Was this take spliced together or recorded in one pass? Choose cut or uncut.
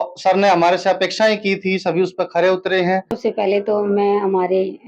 cut